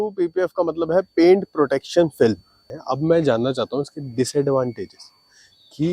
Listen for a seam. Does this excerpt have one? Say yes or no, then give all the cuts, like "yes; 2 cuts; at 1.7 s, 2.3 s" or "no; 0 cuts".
yes; 1 cut; at 2.7 s